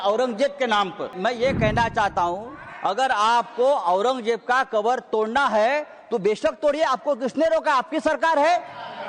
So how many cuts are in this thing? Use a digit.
1